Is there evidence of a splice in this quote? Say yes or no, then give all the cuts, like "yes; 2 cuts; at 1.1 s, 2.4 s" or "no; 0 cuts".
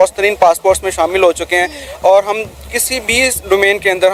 no; 0 cuts